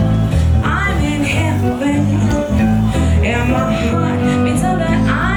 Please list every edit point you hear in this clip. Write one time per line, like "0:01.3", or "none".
none